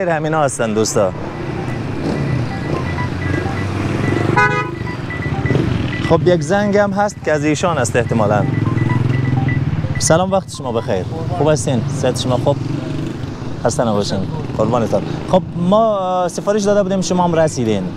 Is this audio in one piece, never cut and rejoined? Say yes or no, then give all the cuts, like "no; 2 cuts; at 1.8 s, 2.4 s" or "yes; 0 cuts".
yes; 0 cuts